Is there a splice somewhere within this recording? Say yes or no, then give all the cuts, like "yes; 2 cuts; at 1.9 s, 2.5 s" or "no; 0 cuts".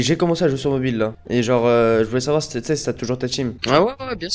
yes; 2 cuts; at 1.2 s, 3.6 s